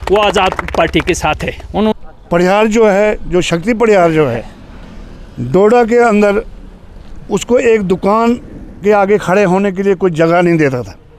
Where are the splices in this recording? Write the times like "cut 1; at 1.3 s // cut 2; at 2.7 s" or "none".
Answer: cut 1; at 1.9 s

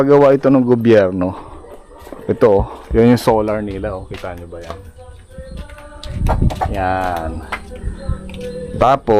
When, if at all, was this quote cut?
none

